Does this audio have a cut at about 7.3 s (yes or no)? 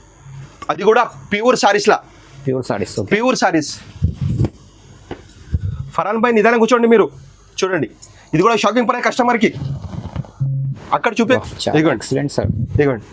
no